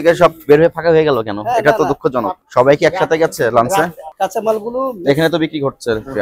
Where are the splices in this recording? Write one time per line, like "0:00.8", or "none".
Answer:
0:02.4
0:04.0